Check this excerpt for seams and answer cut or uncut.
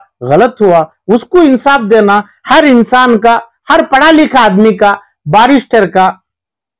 uncut